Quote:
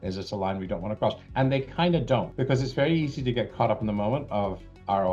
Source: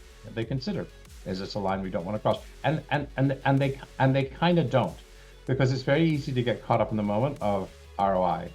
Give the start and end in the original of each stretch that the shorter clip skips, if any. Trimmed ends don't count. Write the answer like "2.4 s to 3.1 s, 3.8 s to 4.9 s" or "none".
2.5 s to 3.9 s, 5.0 s to 5.4 s